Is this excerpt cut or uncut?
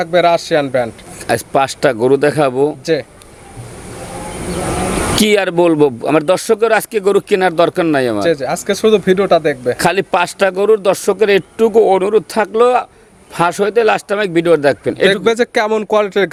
uncut